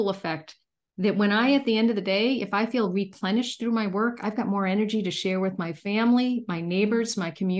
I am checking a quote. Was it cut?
no; 0 cuts

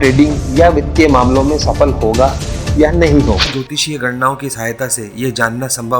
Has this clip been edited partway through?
yes; 1 cut; at 3.5 s

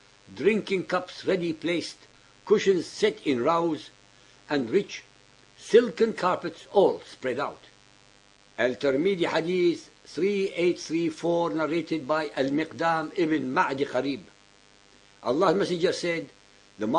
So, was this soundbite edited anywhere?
yes; 1 cut; at 10.5 s

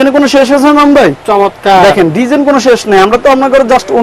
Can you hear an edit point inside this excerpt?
no; 0 cuts

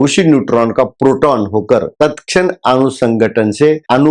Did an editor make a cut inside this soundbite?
no; 0 cuts

